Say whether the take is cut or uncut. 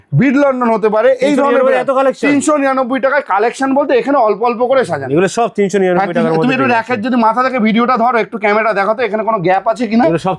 uncut